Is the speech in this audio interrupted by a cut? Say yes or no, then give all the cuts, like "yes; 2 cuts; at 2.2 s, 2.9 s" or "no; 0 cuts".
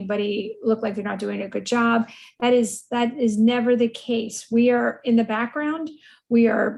no; 0 cuts